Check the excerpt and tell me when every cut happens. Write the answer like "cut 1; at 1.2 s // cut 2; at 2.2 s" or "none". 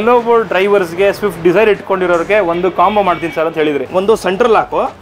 cut 1; at 3.8 s